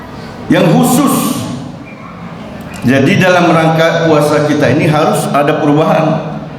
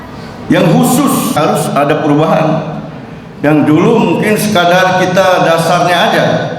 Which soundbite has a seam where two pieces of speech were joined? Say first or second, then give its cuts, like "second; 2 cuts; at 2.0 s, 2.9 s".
second; 1 cut; at 1.4 s